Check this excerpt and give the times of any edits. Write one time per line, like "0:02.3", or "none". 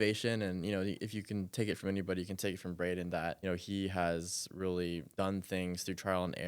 0:03.4
0:05.1